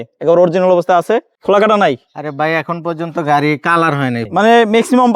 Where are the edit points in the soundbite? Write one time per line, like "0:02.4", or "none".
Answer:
0:01.3
0:04.2